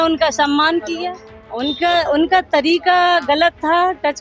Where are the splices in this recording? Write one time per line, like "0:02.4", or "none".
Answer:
0:01.6